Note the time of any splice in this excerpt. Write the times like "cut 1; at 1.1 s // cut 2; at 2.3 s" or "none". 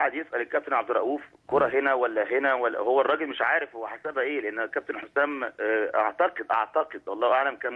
cut 1; at 5.0 s